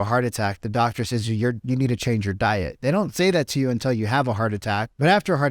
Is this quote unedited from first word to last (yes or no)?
yes